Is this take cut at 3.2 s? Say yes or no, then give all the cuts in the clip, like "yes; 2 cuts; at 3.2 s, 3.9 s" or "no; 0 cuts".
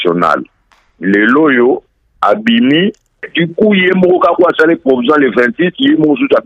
yes; 1 cut; at 3.2 s